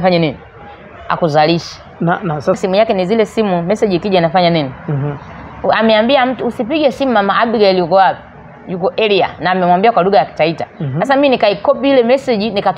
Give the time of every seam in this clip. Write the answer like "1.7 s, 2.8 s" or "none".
2.6 s